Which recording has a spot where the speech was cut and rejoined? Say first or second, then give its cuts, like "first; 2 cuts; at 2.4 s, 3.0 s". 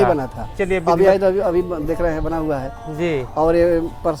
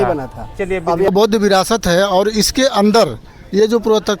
second; 1 cut; at 1.1 s